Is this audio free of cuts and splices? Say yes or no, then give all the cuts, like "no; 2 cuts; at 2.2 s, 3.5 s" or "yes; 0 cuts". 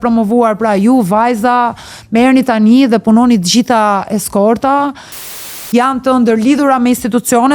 no; 1 cut; at 5.3 s